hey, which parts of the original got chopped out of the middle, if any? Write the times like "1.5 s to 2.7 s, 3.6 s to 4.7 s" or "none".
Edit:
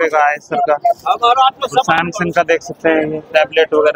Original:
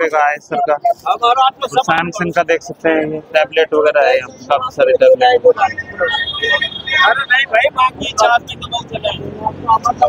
none